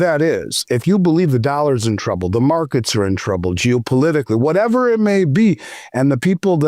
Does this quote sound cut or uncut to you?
uncut